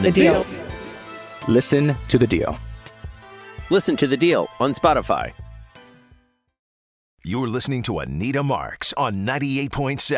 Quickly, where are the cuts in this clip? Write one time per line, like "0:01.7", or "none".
0:07.1